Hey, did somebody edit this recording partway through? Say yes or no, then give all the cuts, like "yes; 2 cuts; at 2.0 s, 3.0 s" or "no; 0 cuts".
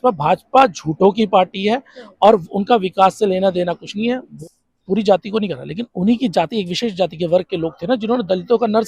yes; 1 cut; at 4.3 s